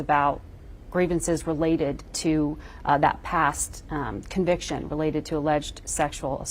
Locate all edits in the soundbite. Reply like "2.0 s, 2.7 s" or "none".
none